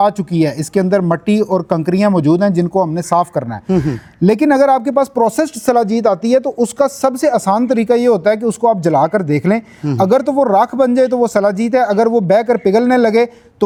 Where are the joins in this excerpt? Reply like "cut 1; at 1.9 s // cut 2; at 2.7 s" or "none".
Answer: none